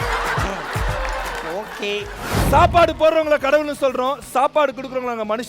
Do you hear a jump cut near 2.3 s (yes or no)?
yes